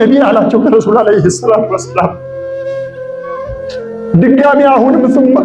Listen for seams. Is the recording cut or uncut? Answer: uncut